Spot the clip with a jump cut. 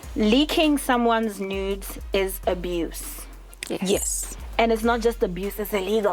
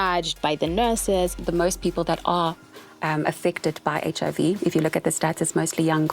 second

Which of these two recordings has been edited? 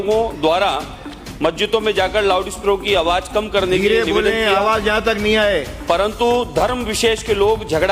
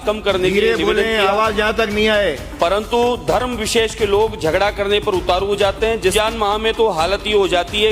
second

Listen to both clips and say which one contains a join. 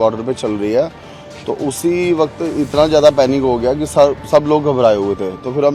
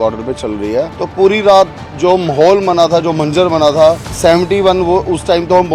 second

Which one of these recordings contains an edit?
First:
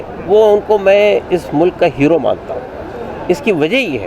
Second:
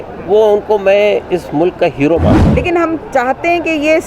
second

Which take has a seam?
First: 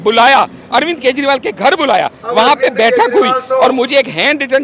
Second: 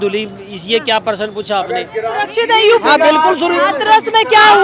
second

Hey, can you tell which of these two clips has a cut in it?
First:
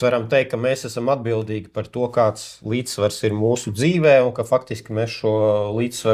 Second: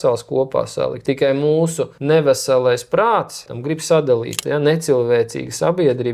second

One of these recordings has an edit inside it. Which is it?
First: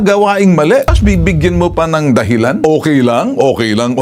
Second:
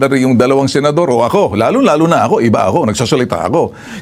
first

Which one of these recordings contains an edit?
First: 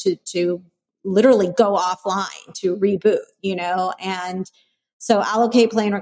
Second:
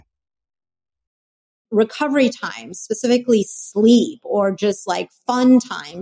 second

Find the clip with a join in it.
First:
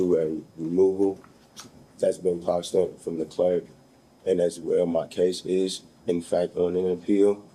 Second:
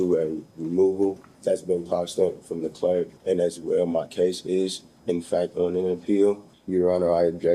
second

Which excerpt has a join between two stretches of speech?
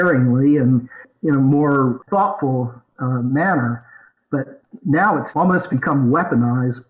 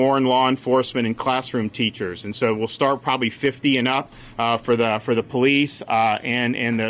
first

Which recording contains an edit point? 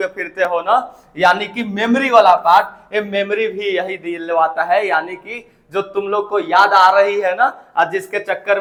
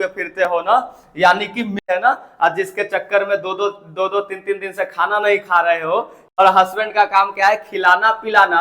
second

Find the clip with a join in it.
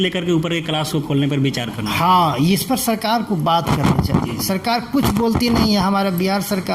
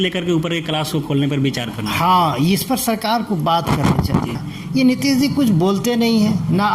second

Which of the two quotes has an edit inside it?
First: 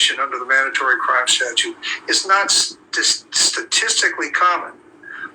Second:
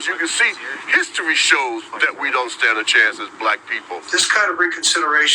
second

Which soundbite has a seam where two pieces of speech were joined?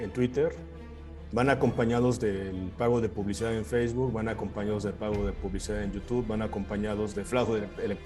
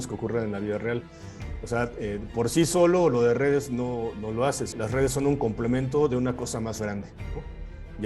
second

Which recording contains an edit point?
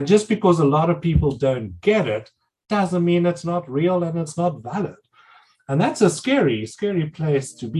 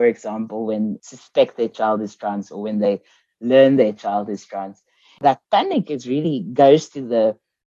second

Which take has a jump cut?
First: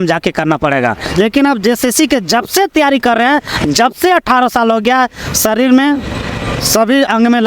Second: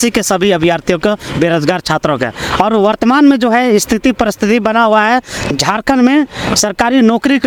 first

